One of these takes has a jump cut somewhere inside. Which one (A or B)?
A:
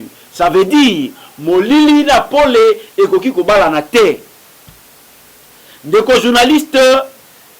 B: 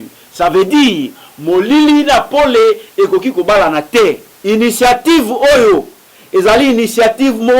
B